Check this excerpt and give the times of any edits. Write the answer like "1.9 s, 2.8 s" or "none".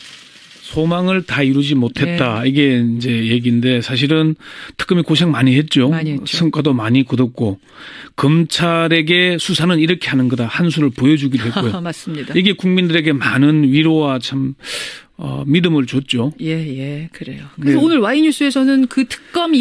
14.7 s